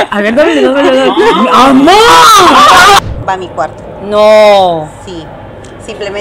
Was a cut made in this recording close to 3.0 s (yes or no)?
yes